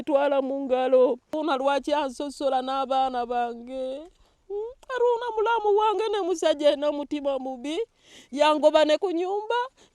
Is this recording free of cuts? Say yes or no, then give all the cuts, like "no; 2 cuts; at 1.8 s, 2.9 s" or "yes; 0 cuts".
no; 1 cut; at 1.3 s